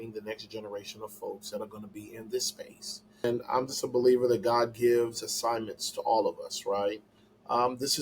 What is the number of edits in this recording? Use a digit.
1